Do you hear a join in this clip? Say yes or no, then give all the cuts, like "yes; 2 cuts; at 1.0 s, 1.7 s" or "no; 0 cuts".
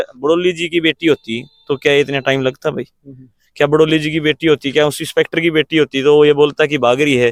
no; 0 cuts